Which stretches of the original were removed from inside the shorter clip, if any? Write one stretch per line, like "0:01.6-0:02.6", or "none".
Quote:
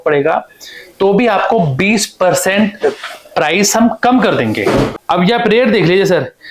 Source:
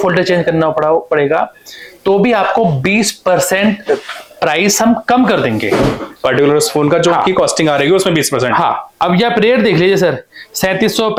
0:06.0-0:08.9